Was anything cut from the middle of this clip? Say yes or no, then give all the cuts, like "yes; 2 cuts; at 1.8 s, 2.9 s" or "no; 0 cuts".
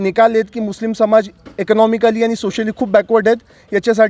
no; 0 cuts